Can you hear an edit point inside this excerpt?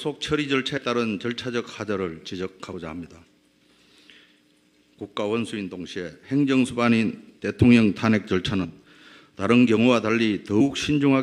yes; 1 cut; at 10.0 s

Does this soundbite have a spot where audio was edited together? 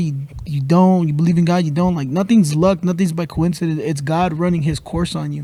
no; 0 cuts

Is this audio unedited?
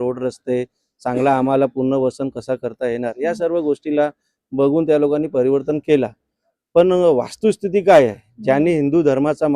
yes; 0 cuts

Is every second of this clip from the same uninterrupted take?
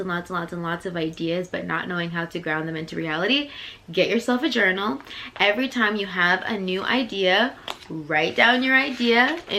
yes; 0 cuts

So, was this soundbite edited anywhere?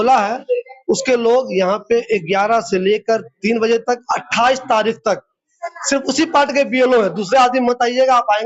no; 0 cuts

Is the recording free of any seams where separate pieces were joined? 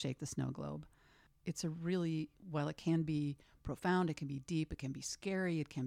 yes; 0 cuts

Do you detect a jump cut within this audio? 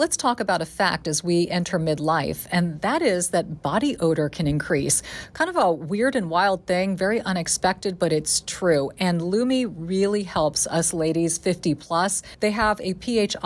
yes; 1 cut; at 12.2 s

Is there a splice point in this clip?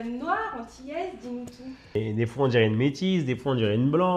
yes; 1 cut; at 1.9 s

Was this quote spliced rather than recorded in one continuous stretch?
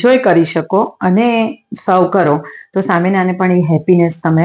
no; 0 cuts

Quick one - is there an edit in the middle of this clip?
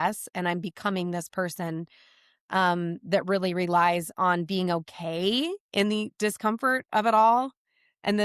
no; 0 cuts

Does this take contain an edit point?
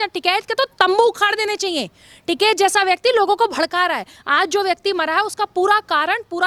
no; 0 cuts

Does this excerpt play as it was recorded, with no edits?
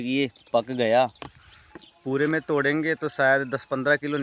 yes; 0 cuts

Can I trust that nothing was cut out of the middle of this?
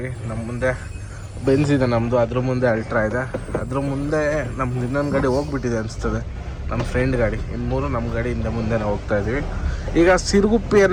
yes; 0 cuts

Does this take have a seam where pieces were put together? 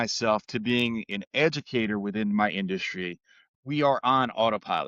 yes; 1 cut; at 3.4 s

